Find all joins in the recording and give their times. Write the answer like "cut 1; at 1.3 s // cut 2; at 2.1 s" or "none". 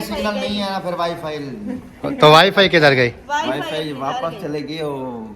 none

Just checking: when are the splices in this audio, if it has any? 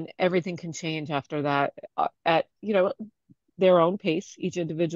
none

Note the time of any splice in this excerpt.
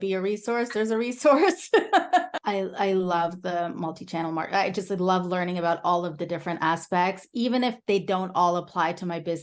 cut 1; at 2.4 s

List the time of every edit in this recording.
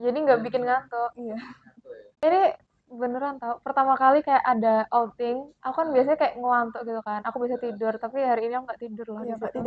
cut 1; at 2.1 s

